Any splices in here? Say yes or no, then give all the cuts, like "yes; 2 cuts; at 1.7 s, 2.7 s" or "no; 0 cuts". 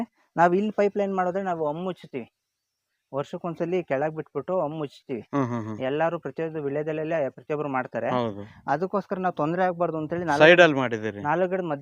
no; 0 cuts